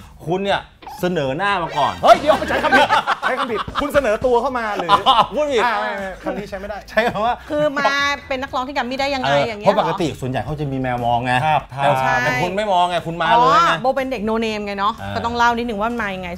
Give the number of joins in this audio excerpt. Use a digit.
0